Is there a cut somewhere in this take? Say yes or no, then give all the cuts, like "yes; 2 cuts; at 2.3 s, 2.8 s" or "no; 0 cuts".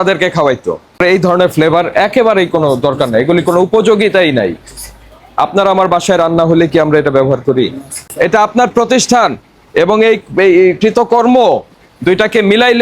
yes; 2 cuts; at 1.0 s, 8.0 s